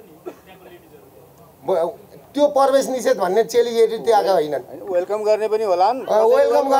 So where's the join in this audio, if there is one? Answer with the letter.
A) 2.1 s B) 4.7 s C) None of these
C